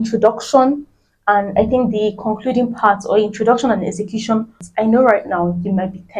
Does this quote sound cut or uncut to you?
cut